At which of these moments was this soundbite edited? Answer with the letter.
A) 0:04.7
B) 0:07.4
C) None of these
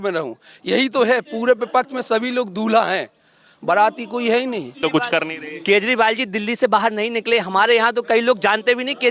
A